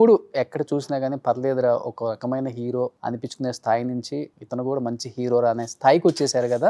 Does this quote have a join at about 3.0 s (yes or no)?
yes